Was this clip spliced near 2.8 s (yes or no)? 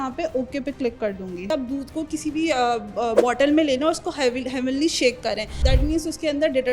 no